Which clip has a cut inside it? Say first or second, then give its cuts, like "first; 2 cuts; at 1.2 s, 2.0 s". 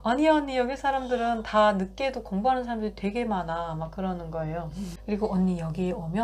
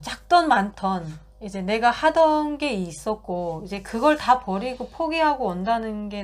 first; 1 cut; at 4.9 s